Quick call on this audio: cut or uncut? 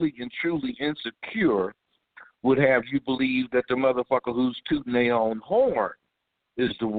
uncut